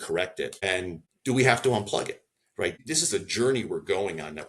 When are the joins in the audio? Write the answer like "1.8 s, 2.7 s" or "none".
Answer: 0.9 s, 2.8 s